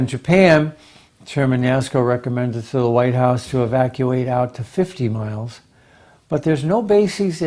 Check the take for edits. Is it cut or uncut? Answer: cut